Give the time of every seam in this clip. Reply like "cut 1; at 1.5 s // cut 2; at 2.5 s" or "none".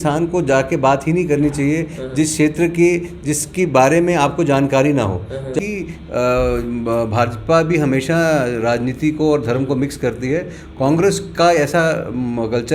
cut 1; at 5.5 s